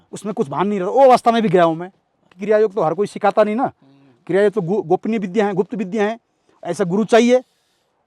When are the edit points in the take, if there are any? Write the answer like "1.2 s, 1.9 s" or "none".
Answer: 2.3 s

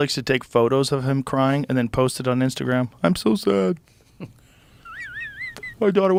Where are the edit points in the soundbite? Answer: none

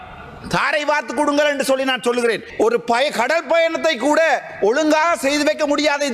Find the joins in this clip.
2.5 s

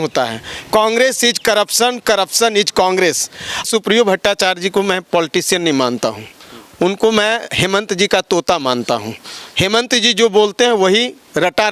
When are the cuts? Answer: 3.6 s

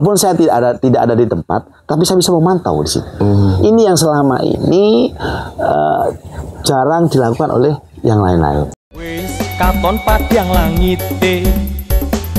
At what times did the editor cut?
8.7 s

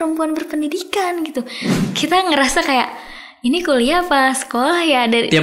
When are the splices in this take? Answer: 1.7 s

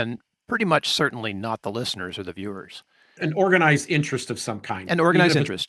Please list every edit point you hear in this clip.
3.2 s

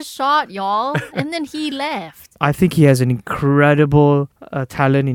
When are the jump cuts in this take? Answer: 1.1 s, 2.3 s

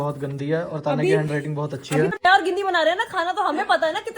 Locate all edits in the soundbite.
2.2 s

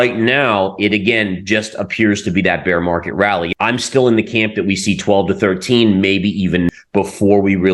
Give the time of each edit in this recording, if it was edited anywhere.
3.5 s, 6.7 s

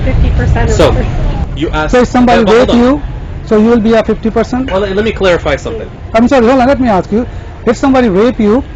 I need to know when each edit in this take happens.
none

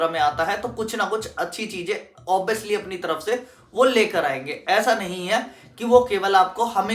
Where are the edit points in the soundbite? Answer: none

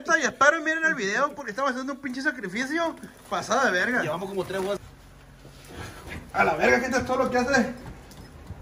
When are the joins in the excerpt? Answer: 4.9 s

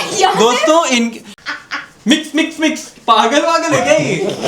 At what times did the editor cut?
1.3 s

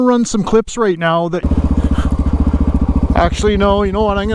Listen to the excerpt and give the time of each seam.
1.4 s

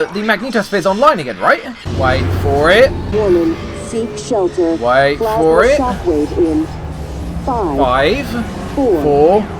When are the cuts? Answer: 1.8 s, 3.0 s

